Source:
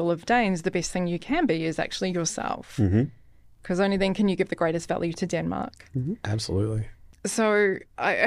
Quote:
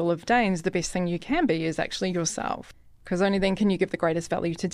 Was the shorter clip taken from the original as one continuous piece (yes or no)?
no